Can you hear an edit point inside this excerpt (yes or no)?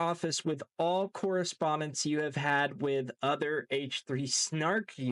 no